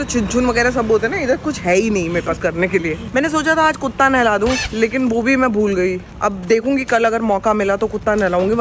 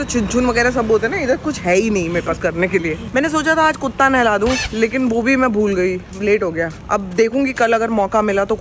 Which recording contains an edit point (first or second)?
first